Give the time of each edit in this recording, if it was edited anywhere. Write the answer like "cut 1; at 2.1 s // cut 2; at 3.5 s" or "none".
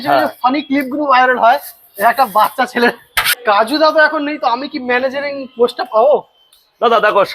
cut 1; at 3.4 s

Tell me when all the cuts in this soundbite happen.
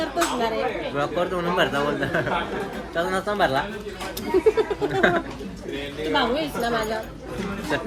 none

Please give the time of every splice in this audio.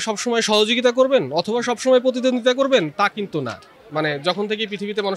cut 1; at 3.8 s

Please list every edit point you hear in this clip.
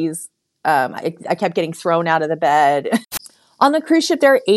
cut 1; at 3.1 s

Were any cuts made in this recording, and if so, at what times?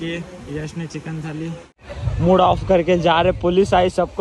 cut 1; at 1.9 s

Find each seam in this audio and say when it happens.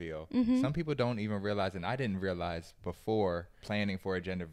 cut 1; at 3.6 s

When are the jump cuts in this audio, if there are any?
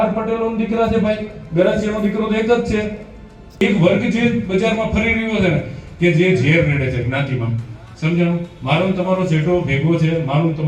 cut 1; at 3.6 s

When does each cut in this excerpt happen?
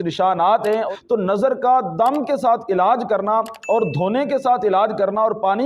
cut 1; at 1.0 s

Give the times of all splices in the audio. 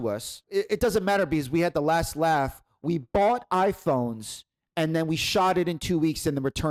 none

